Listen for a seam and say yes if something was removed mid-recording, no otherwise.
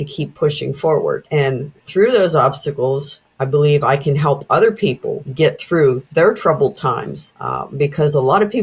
no